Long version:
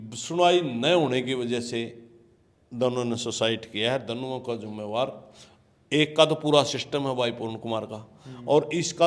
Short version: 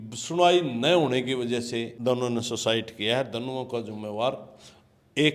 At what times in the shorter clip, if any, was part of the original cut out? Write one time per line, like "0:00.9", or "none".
0:01.9